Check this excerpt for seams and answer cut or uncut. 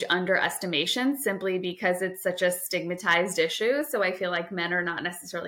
uncut